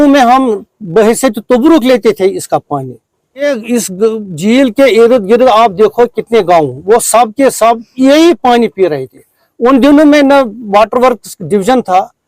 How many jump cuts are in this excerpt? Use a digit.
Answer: 1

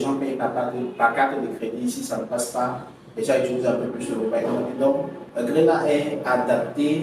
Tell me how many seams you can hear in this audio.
1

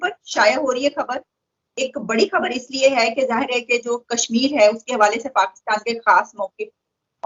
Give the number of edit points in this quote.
0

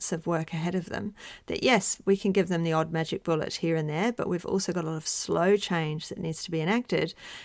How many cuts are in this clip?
0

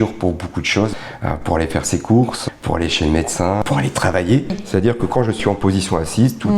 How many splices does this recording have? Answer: 4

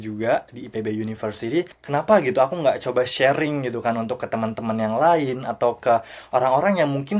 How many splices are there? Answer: 1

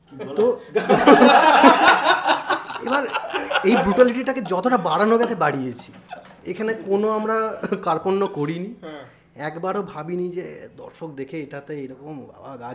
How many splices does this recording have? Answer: 0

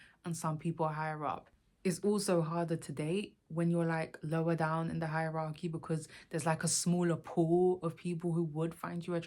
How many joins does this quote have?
1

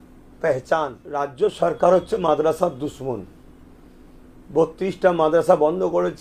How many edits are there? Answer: 1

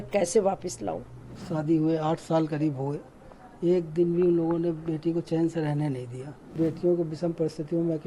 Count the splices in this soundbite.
2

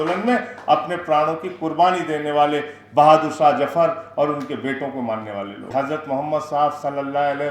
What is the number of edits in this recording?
1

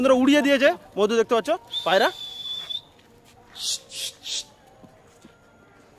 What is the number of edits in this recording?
0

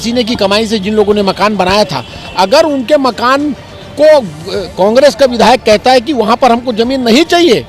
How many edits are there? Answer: 0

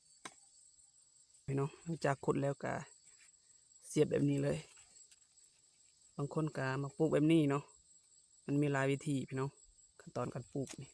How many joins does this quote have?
1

